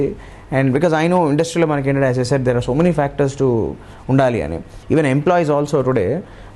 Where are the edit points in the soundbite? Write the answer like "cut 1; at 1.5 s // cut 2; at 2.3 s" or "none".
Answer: cut 1; at 4.8 s